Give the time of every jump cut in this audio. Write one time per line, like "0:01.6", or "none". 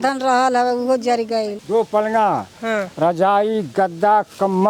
0:01.6